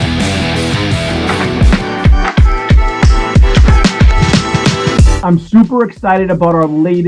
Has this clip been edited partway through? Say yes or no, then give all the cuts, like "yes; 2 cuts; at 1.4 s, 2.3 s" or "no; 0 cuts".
yes; 1 cut; at 1.4 s